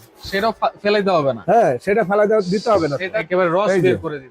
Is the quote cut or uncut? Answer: cut